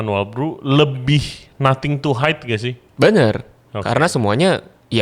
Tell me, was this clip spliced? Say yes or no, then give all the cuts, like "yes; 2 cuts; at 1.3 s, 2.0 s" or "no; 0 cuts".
no; 0 cuts